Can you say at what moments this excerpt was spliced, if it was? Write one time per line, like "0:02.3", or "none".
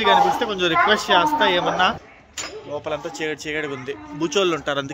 0:02.0